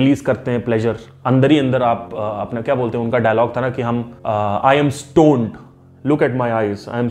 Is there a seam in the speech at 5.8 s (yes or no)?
no